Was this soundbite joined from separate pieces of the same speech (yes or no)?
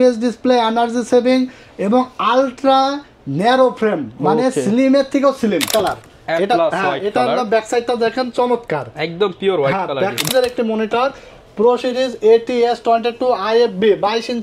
yes